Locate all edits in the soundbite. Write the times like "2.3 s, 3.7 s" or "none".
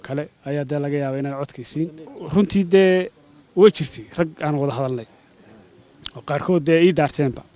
2.1 s